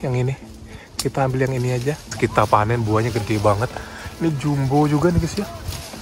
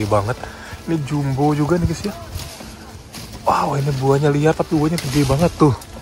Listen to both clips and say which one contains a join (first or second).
first